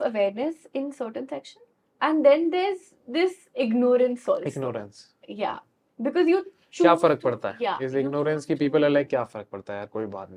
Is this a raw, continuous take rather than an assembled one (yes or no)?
yes